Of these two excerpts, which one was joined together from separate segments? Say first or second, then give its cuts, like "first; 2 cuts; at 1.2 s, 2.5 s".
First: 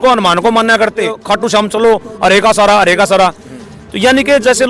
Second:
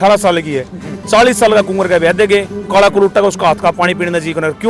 first; 1 cut; at 1.2 s